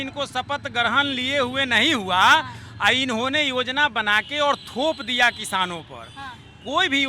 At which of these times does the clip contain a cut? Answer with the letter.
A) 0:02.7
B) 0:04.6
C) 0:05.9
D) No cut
D